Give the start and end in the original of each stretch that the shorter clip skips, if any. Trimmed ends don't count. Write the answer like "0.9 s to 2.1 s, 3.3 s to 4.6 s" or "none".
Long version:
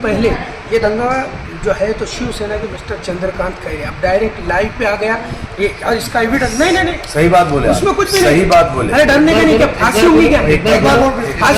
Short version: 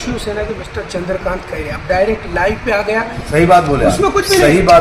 5.3 s to 7.0 s